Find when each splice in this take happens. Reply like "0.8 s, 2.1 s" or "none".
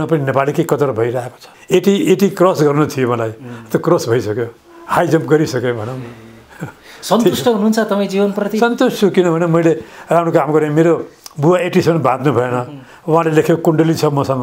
1.5 s